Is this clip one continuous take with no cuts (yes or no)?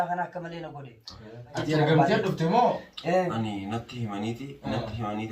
no